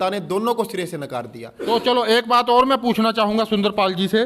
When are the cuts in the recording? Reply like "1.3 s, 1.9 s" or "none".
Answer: 1.5 s